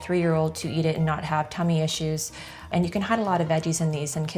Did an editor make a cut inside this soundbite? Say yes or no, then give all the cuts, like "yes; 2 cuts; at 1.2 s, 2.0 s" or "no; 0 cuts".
yes; 1 cut; at 2.7 s